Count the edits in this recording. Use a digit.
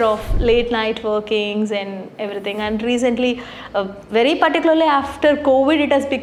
0